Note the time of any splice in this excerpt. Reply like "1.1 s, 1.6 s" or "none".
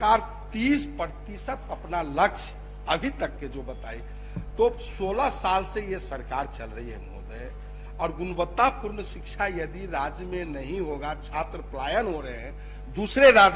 none